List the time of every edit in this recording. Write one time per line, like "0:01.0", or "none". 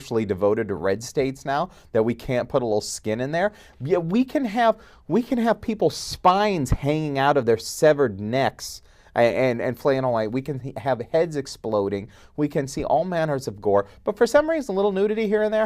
0:01.2